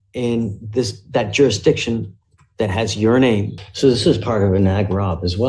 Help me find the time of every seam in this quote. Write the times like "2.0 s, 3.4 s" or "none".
3.6 s